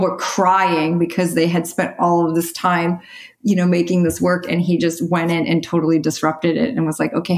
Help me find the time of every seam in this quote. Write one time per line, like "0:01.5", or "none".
none

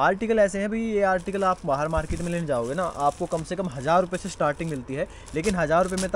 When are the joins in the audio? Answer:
none

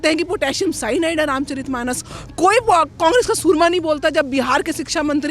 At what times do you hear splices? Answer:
none

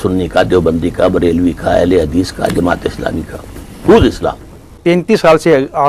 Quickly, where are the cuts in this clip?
0:04.8

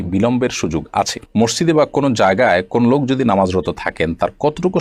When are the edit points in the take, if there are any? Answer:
0:01.3

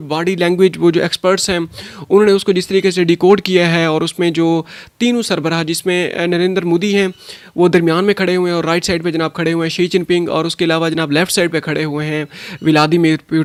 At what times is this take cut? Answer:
none

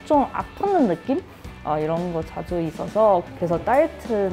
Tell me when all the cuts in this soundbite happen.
0:03.3

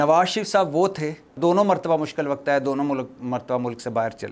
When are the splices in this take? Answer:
0:01.3

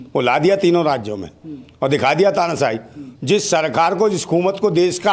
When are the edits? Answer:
none

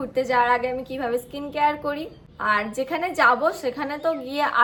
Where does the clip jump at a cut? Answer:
none

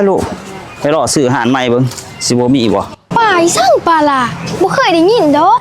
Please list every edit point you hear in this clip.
0:03.0

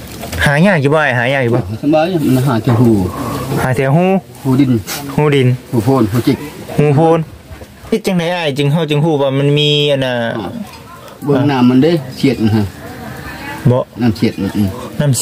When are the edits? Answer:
0:07.9

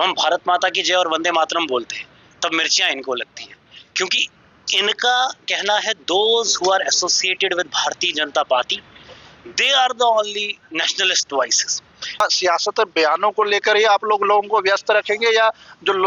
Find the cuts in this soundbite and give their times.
0:12.2

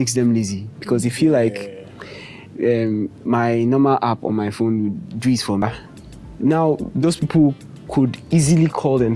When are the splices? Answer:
0:05.6

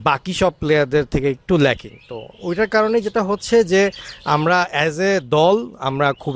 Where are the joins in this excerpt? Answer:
none

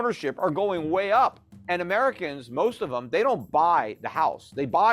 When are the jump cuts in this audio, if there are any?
0:01.5

